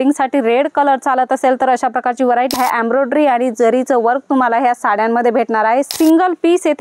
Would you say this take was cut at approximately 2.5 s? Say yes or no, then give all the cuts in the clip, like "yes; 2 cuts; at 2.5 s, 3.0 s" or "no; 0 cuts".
yes; 2 cuts; at 2.5 s, 5.9 s